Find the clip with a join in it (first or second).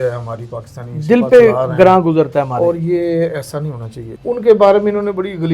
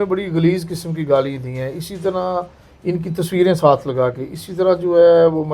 first